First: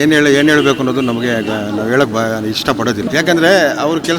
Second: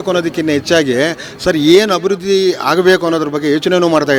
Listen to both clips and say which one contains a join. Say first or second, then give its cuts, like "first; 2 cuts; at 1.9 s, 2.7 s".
first; 1 cut; at 3.0 s